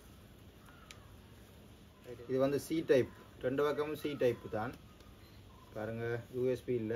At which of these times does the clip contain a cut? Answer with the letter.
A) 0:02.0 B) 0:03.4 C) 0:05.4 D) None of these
A